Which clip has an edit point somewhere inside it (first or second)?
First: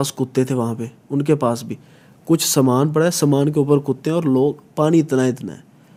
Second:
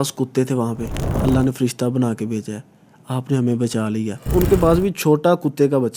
second